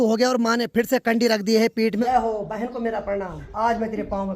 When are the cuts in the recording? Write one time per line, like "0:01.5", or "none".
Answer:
0:02.0
0:03.4